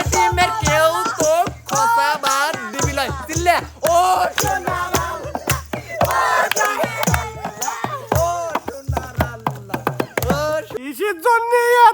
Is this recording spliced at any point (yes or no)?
yes